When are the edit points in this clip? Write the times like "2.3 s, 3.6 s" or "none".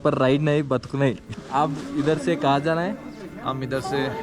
1.3 s